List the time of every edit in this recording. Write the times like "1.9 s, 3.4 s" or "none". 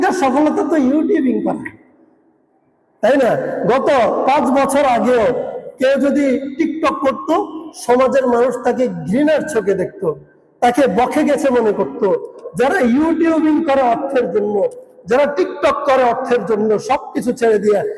12.4 s